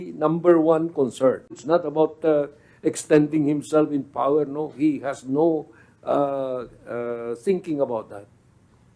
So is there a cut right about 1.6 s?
yes; 1 cut; at 1.6 s

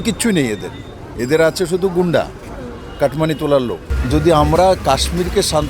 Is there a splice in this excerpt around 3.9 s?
yes; 1 cut; at 3.9 s

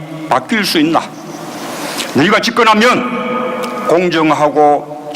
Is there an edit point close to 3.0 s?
yes; 1 cut; at 3.0 s

